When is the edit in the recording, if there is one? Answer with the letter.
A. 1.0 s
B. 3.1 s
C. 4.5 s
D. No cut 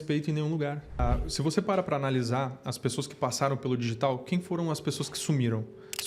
A